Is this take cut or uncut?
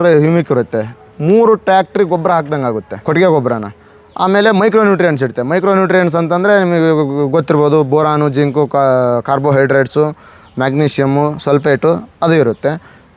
uncut